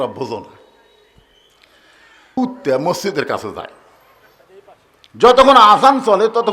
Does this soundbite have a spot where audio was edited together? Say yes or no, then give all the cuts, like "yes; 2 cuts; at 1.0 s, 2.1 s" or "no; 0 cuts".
yes; 1 cut; at 2.3 s